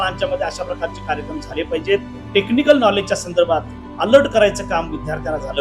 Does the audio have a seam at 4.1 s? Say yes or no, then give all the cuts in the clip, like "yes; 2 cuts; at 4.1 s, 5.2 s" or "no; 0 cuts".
no; 1 cut; at 2.2 s